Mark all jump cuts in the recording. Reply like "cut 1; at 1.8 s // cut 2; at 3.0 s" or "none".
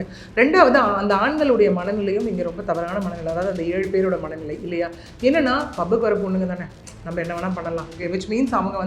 cut 1; at 8.0 s